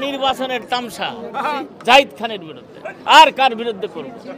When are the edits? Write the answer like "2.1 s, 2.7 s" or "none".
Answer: 1.7 s